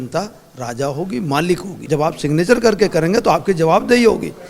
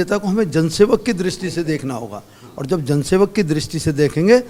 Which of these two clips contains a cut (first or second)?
first